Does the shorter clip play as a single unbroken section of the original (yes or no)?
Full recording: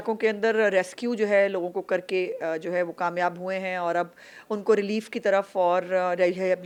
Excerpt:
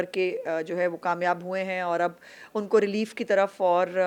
yes